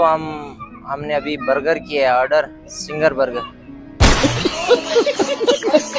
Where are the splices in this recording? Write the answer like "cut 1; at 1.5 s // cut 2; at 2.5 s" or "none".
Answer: cut 1; at 3.8 s